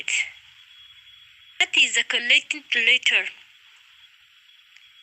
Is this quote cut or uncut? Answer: cut